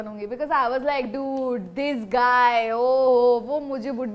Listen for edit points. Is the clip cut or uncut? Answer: uncut